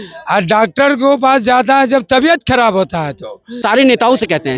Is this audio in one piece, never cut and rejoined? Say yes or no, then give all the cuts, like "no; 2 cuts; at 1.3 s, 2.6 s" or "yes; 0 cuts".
no; 1 cut; at 3.6 s